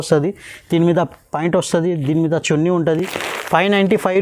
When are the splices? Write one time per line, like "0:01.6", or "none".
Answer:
none